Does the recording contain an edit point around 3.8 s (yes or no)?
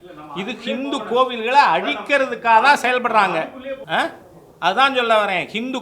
yes